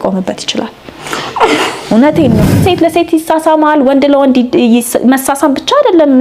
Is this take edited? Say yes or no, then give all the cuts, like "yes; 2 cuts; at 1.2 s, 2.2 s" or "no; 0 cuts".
no; 0 cuts